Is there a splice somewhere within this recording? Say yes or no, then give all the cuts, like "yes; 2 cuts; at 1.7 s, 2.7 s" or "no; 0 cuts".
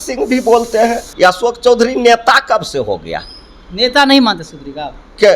yes; 1 cut; at 1.0 s